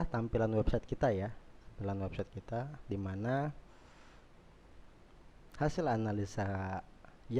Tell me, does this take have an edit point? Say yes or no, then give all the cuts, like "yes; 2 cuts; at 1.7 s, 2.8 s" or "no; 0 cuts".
no; 0 cuts